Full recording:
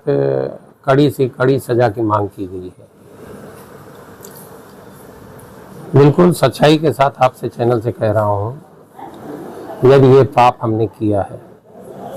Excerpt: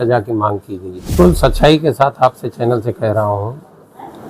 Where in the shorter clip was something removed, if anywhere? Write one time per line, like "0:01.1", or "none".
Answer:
0:01.1